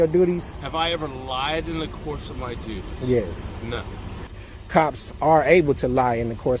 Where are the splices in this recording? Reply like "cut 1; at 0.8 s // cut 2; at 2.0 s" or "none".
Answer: cut 1; at 4.3 s